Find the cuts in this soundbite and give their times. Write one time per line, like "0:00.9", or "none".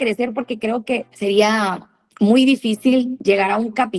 0:01.1
0:03.1

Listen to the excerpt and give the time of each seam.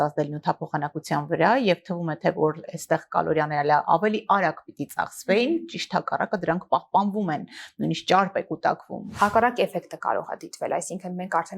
0:09.0

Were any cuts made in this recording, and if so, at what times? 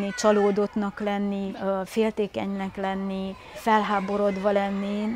0:01.5
0:03.6

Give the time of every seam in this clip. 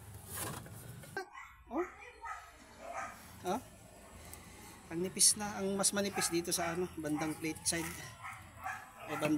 0:01.3

